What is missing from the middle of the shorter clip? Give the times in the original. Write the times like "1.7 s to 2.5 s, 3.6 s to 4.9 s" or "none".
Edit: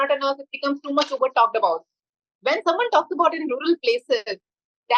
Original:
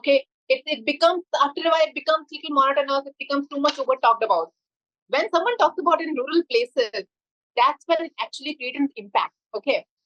none